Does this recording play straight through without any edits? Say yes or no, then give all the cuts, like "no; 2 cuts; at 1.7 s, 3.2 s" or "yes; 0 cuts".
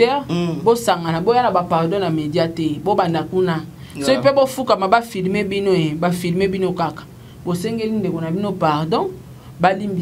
yes; 0 cuts